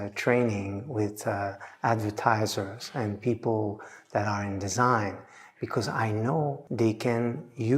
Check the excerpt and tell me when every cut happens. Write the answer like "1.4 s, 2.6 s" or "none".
6.6 s

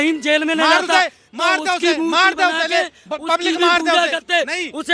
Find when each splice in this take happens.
none

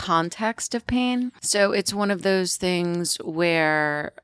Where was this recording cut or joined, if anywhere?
1.4 s

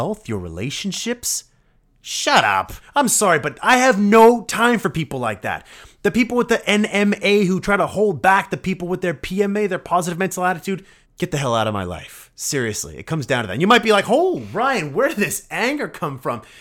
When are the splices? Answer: 2.8 s, 11.0 s

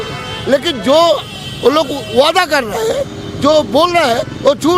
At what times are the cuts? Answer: none

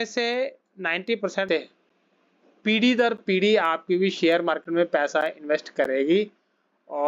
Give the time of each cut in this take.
1.5 s

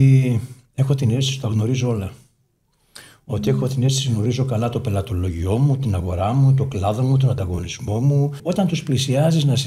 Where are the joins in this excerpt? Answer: 8.4 s

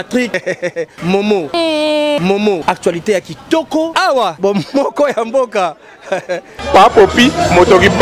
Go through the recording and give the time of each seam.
6.6 s

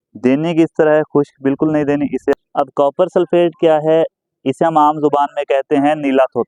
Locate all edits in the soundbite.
2.3 s

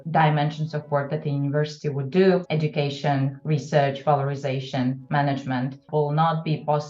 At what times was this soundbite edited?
5.9 s

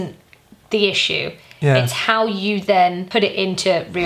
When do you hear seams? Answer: 3.0 s

